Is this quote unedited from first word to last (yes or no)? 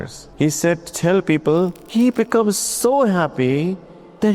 no